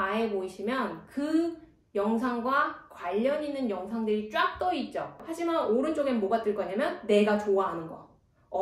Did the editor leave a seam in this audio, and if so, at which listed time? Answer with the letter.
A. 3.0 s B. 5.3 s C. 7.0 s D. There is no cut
B